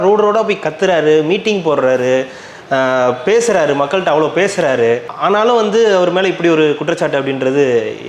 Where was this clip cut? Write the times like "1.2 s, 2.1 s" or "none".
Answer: none